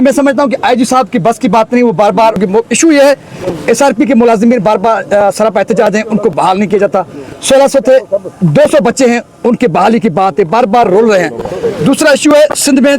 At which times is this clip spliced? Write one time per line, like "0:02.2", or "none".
0:02.4